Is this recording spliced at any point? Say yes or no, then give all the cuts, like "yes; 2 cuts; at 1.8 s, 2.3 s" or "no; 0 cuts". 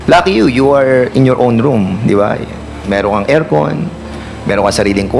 no; 0 cuts